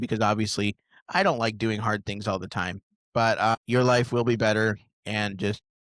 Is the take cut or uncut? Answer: uncut